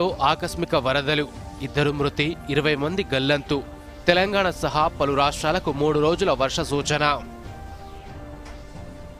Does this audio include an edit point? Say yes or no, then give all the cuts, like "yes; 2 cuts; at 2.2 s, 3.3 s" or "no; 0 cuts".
no; 0 cuts